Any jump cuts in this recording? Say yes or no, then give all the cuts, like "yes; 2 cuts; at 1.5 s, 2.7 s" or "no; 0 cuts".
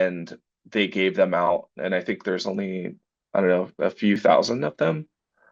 yes; 1 cut; at 4.2 s